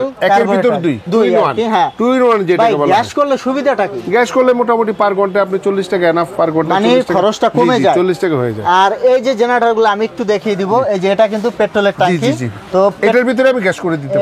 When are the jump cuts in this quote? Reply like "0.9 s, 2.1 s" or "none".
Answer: none

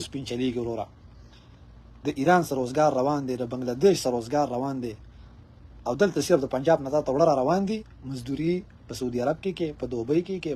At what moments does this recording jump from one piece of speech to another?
none

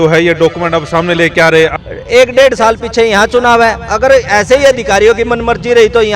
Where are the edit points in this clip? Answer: 1.8 s

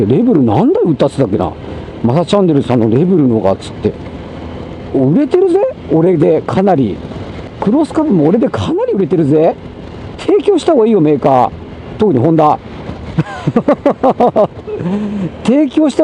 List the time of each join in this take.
none

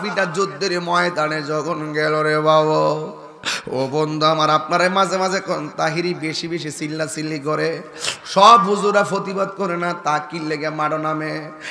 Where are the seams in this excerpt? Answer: none

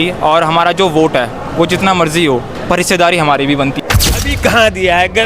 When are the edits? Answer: 3.8 s

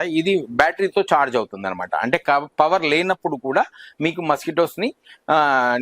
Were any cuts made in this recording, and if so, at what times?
none

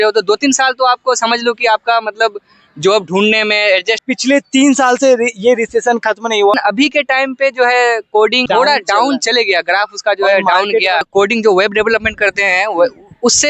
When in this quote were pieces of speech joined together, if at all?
4.0 s, 6.5 s, 8.4 s, 11.1 s

